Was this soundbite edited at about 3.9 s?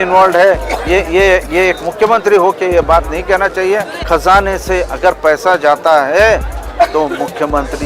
yes; 1 cut; at 3.9 s

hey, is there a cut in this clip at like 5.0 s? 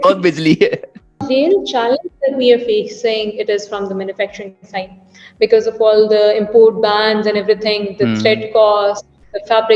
no; 1 cut; at 1.2 s

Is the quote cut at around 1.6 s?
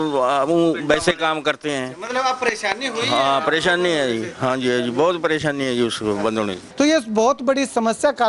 no; 1 cut; at 6.6 s

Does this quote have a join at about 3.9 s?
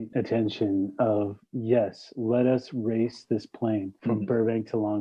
yes; 1 cut; at 3.9 s

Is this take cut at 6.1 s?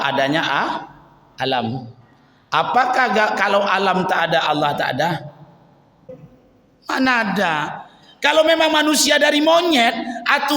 yes; 1 cut; at 6.1 s

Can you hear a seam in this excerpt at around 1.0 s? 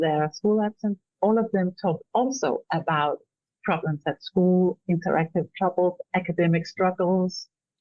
yes; 1 cut; at 1.0 s

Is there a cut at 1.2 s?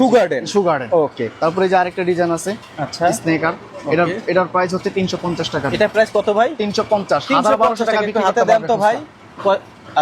no; 0 cuts

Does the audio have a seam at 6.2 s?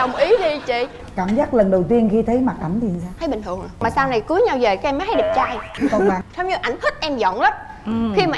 yes; 1 cut; at 6.2 s

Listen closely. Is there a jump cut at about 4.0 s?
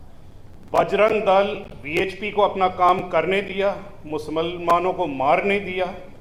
no; 0 cuts

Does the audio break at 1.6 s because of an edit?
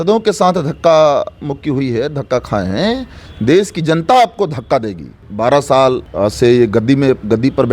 no; 2 cuts; at 5.2 s, 6.1 s

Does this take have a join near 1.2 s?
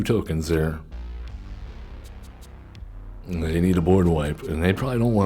no; 1 cut; at 3.3 s

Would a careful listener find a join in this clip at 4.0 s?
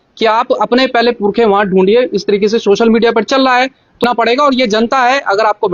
yes; 1 cut; at 4.0 s

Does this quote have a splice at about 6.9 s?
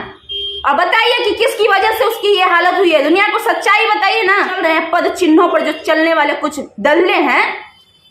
no; 1 cut; at 4.6 s

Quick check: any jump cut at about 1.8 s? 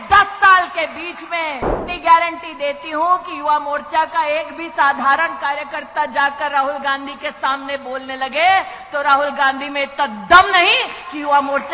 yes; 1 cut; at 1.8 s

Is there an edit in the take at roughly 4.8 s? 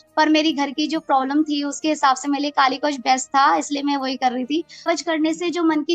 yes; 1 cut; at 4.8 s

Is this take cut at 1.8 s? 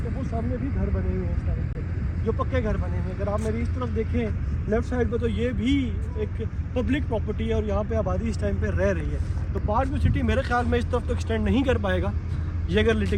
no; 0 cuts

